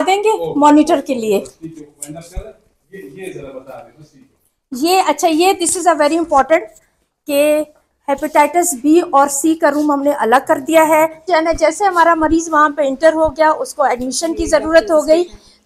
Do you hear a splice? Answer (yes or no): yes